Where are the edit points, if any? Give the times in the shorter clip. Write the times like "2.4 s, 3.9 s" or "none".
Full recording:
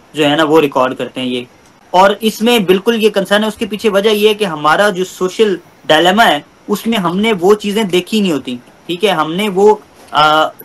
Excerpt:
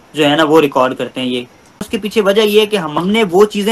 1.8 s, 2.9 s